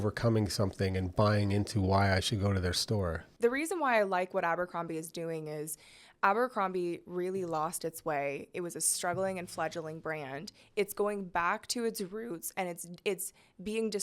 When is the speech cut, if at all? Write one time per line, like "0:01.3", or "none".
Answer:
0:03.2